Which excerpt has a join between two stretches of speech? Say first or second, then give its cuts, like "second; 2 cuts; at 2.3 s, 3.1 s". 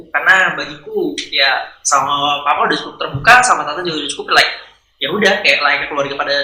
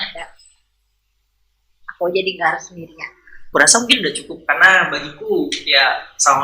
second; 1 cut; at 3.4 s